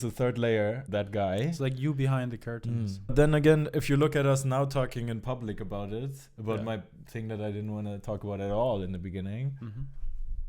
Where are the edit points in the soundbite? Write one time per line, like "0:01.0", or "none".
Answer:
0:00.8
0:03.1